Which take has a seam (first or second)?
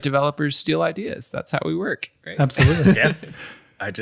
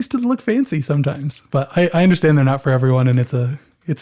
second